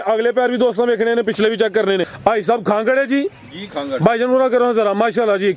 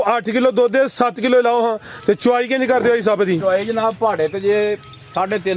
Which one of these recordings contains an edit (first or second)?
first